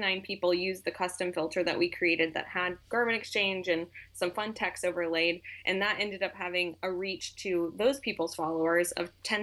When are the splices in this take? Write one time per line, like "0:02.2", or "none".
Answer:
none